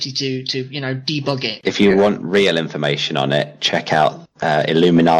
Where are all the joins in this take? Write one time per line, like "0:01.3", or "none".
0:01.6